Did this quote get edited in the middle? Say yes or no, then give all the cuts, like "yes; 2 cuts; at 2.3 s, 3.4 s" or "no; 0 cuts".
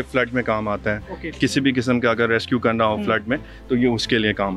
no; 0 cuts